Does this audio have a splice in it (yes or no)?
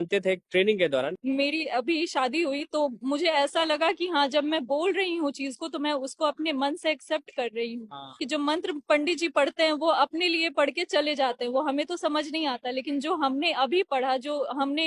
yes